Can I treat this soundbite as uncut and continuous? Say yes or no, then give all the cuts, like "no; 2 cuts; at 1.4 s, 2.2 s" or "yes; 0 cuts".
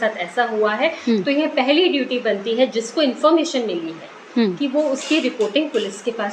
yes; 0 cuts